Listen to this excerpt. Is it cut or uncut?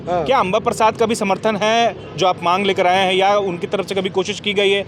uncut